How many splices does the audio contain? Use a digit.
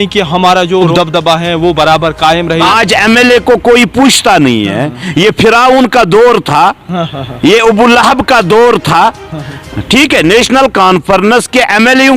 1